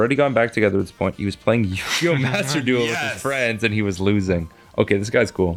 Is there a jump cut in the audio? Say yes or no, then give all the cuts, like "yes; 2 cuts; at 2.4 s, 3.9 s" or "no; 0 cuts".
no; 0 cuts